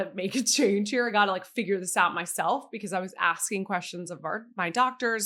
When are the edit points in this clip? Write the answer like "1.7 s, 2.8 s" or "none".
none